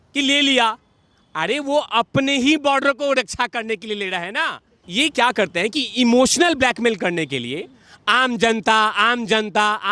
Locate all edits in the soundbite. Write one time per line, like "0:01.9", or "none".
0:04.8